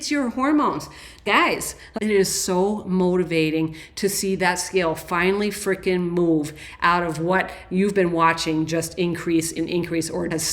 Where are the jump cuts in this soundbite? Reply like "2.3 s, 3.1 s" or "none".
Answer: 1.8 s, 9.5 s